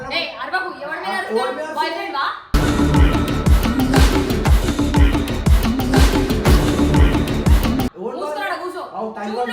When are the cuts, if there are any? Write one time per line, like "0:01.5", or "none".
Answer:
none